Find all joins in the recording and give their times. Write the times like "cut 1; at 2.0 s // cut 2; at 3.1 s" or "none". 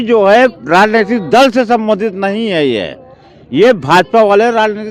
none